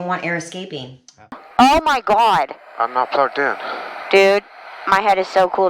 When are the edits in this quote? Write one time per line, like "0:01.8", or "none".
0:01.3